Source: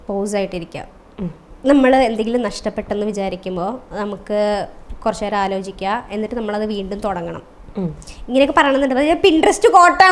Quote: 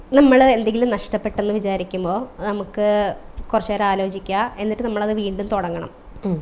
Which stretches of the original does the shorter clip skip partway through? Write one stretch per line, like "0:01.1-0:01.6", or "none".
none